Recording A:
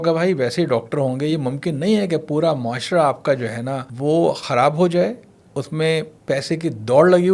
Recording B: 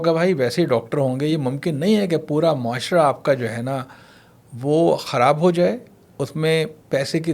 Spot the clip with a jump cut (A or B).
A